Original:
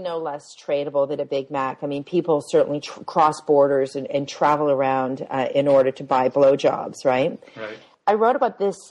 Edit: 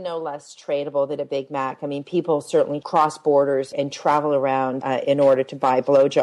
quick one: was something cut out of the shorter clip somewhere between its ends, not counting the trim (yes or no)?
yes